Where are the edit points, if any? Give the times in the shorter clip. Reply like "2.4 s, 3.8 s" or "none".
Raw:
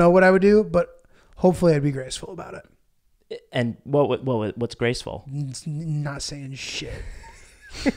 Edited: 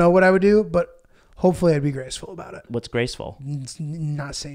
2.7 s